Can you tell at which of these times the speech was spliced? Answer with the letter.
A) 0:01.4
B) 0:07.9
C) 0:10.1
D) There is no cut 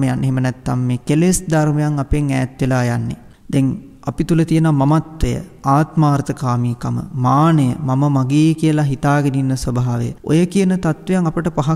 C